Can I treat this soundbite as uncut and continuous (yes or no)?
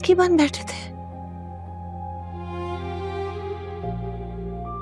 yes